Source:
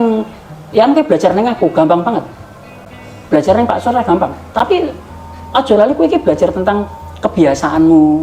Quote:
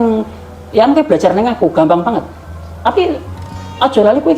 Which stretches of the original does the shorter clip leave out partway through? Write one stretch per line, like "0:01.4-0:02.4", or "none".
0:02.8-0:04.5